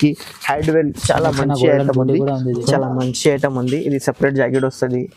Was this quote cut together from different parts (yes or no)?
yes